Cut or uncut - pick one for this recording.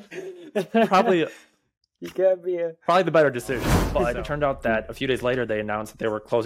cut